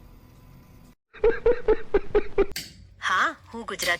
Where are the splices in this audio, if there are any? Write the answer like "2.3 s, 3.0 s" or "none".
1.1 s, 2.5 s